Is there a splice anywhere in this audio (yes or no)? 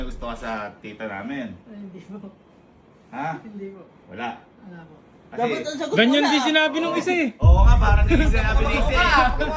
no